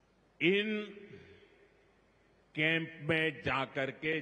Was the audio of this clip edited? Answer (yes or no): no